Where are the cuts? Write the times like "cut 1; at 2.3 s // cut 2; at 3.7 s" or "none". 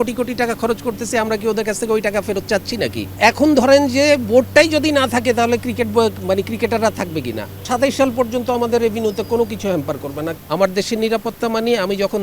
cut 1; at 3.1 s // cut 2; at 7.7 s // cut 3; at 10.3 s